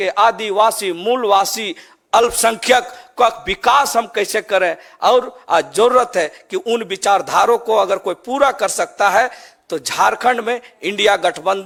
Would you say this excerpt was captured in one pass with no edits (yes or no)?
yes